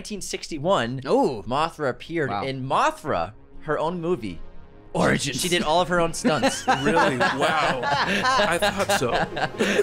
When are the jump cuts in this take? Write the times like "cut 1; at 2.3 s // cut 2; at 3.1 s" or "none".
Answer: none